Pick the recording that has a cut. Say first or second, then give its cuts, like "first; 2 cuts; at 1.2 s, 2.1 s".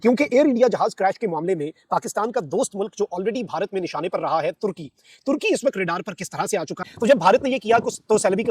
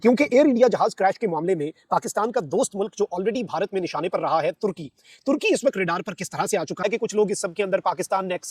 first; 1 cut; at 6.7 s